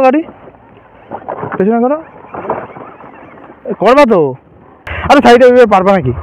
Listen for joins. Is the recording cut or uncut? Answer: cut